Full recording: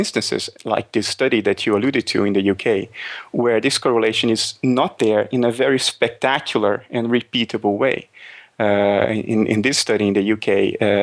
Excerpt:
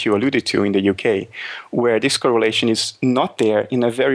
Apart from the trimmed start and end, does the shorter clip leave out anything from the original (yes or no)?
no